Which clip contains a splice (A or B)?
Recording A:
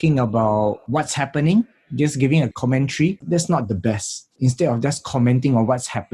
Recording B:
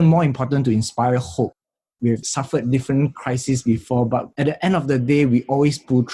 A